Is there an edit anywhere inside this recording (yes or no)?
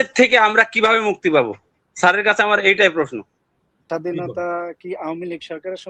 yes